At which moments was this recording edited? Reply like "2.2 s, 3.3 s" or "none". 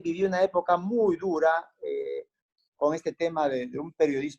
none